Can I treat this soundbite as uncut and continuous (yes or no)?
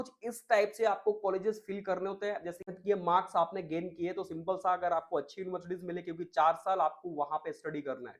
no